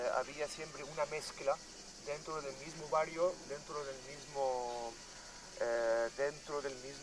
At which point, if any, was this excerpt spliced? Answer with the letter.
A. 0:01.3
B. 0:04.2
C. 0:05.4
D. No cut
A